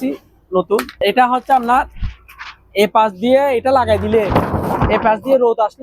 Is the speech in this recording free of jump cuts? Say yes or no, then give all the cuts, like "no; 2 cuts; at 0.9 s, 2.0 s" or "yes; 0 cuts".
no; 1 cut; at 0.9 s